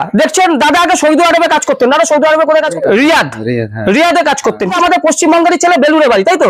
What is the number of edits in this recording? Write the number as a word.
two